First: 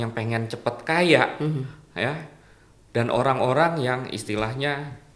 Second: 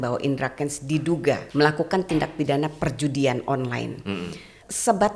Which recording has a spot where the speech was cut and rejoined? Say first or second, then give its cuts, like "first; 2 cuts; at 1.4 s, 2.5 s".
second; 1 cut; at 1.5 s